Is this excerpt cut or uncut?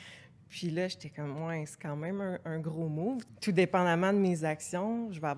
cut